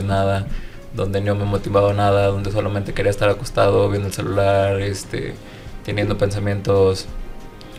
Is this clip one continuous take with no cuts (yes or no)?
yes